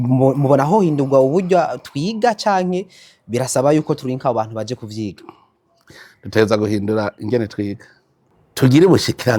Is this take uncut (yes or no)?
yes